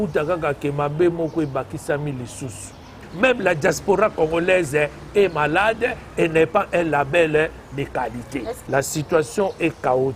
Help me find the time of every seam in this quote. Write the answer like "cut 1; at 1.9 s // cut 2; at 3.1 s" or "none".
cut 1; at 3.1 s // cut 2; at 8.5 s

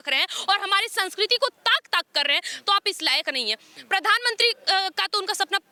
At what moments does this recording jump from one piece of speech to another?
none

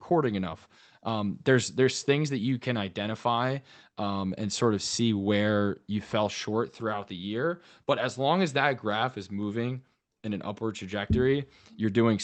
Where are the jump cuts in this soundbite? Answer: none

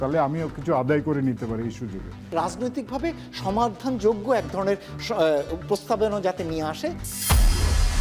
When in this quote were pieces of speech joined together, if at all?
none

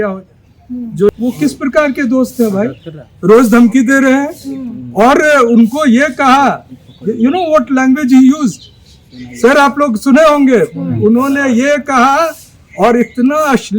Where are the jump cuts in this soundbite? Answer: cut 1; at 1.1 s

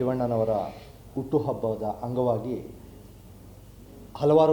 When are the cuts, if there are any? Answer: none

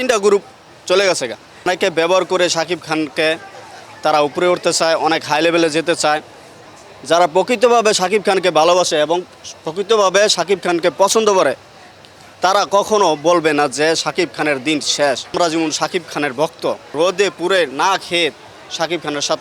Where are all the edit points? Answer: cut 1; at 1.7 s // cut 2; at 6.6 s // cut 3; at 15.3 s // cut 4; at 16.9 s

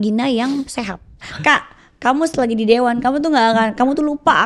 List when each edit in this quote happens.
cut 1; at 1.3 s

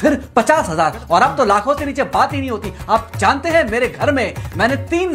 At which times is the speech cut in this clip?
none

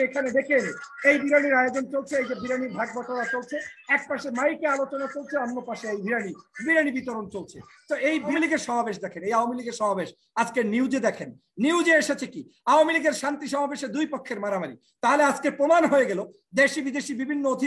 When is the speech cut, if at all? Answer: cut 1; at 8.3 s

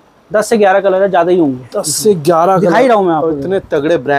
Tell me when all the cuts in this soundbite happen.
none

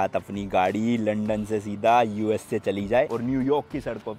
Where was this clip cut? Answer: cut 1; at 3.1 s

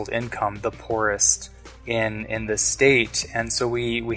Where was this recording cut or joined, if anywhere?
none

